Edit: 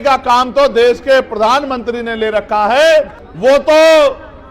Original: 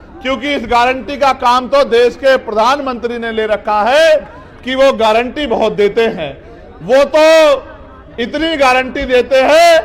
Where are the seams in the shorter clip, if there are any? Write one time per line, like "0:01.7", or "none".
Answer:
0:03.2

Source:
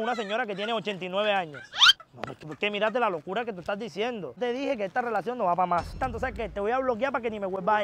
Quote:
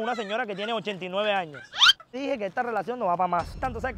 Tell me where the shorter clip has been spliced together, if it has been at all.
0:02.2

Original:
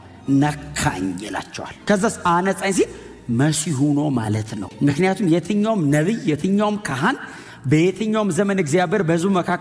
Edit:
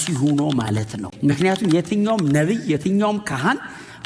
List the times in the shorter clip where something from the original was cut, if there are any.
none

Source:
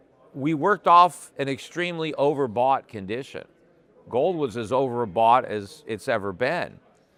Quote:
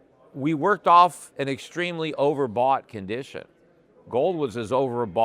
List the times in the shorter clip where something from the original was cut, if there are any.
none

